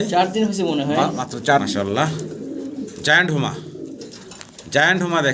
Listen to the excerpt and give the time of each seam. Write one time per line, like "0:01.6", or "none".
0:01.6